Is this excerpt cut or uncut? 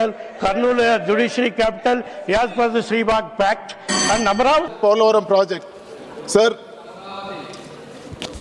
cut